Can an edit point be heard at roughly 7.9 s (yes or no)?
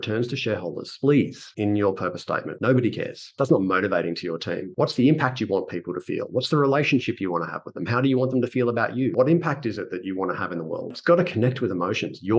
no